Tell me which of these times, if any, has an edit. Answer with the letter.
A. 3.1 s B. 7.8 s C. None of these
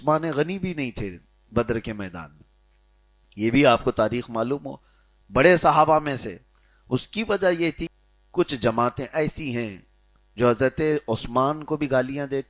B